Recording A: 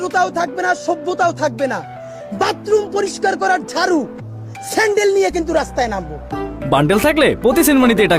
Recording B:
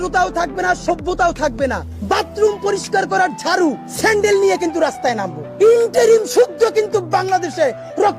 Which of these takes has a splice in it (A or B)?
B